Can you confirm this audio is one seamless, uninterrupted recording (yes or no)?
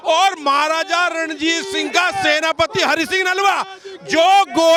yes